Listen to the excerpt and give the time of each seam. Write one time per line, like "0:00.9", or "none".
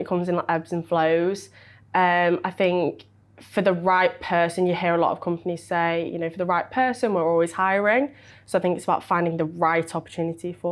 none